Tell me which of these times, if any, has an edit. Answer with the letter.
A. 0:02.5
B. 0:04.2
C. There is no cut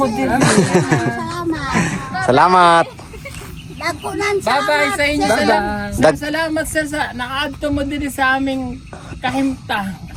C